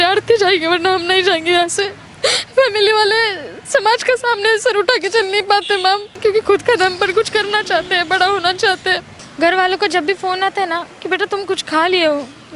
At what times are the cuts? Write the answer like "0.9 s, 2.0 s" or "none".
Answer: 2.0 s, 6.1 s, 9.1 s